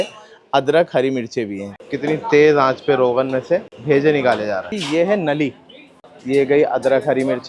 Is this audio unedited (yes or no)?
no